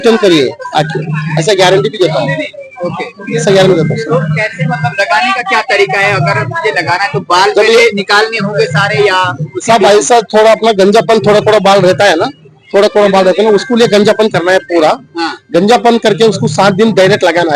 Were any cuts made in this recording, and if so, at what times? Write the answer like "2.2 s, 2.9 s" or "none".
none